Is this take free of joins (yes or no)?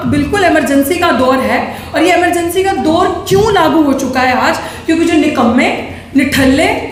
yes